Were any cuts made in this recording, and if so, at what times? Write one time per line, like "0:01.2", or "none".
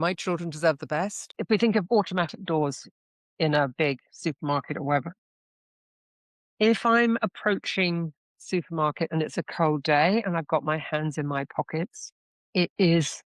0:01.3